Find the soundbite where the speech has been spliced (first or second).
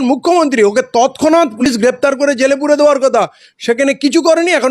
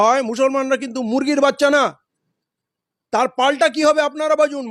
first